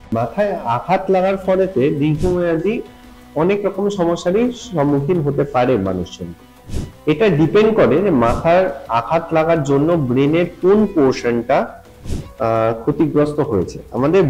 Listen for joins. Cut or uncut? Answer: uncut